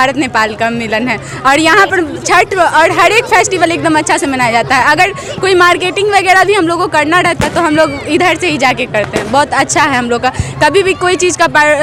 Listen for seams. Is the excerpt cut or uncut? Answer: uncut